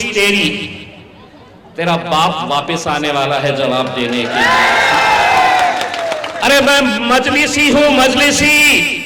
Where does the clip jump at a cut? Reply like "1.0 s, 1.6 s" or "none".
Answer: 6.3 s

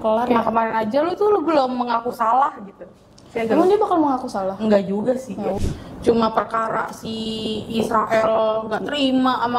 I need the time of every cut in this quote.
5.6 s

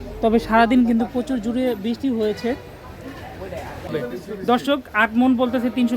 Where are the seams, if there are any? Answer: 3.9 s

